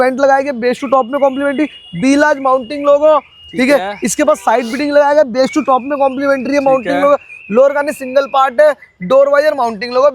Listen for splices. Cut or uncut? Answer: uncut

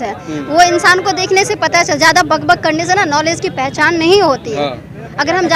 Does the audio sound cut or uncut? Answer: uncut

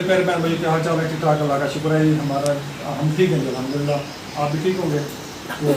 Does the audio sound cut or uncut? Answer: uncut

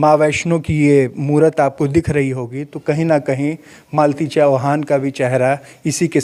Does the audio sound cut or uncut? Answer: uncut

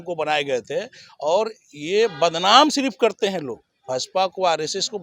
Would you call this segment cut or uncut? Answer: uncut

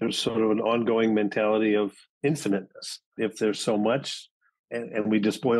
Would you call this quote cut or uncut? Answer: cut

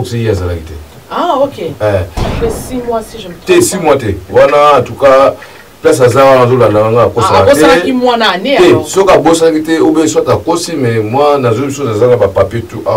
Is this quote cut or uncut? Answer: cut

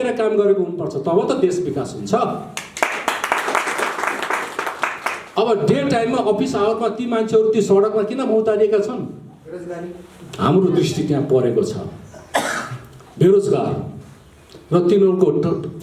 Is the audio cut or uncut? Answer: uncut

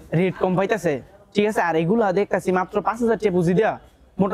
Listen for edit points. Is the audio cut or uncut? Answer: uncut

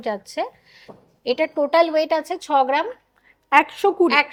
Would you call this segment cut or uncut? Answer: uncut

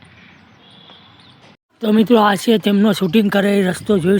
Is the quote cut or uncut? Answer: cut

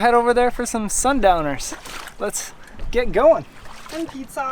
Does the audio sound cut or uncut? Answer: uncut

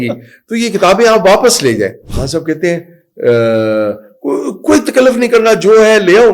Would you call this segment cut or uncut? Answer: cut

